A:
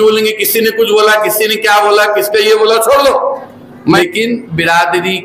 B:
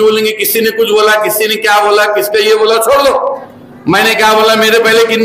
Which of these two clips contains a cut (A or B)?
A